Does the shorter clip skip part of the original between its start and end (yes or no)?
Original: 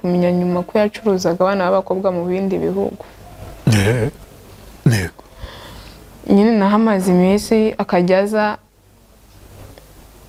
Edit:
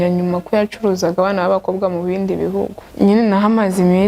yes